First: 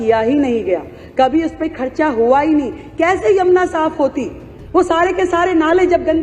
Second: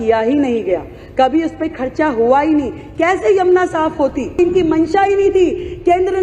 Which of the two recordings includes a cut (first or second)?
second